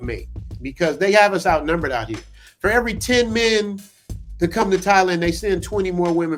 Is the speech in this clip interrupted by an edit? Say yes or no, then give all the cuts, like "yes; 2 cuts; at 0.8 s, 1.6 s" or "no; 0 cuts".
no; 0 cuts